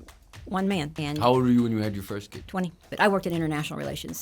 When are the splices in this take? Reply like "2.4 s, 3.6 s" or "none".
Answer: 1.0 s, 2.7 s